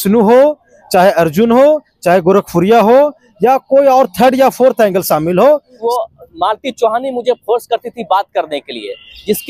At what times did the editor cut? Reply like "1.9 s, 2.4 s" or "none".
5.8 s